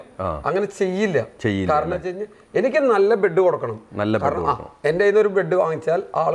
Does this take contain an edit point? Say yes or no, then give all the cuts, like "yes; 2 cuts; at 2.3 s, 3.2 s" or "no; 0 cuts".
no; 0 cuts